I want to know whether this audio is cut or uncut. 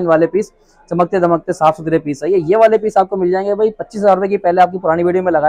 uncut